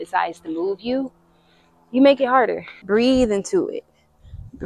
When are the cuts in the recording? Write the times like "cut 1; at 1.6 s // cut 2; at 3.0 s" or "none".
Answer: cut 1; at 2.6 s